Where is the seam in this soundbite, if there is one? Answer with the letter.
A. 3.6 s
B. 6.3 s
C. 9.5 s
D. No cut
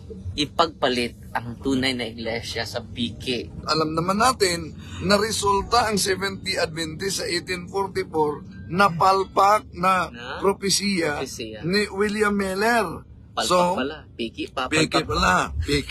A